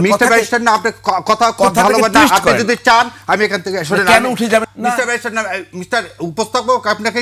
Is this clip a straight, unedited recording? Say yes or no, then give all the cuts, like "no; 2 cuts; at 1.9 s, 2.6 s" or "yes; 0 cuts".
no; 1 cut; at 4.6 s